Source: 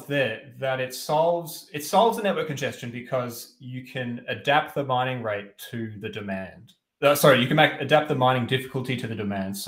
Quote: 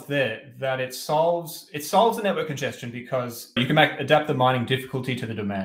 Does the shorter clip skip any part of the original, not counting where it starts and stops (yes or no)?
yes